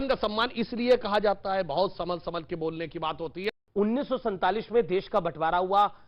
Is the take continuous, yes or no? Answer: no